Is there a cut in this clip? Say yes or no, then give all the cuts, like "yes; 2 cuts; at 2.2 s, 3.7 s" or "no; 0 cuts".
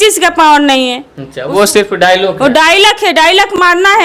no; 0 cuts